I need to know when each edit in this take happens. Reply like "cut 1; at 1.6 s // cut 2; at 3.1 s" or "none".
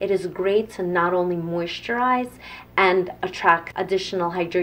cut 1; at 3.7 s